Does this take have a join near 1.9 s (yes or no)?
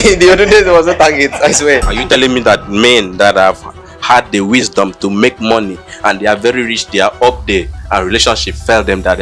yes